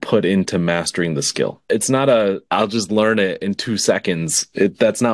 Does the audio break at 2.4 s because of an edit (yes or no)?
yes